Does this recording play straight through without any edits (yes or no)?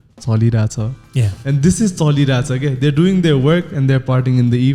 yes